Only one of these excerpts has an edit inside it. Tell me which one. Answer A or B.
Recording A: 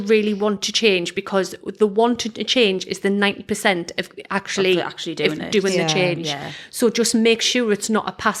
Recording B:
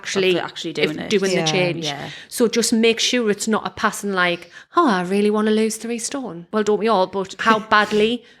B